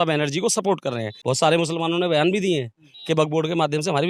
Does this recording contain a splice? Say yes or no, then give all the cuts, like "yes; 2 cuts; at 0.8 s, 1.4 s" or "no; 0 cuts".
yes; 1 cut; at 1.1 s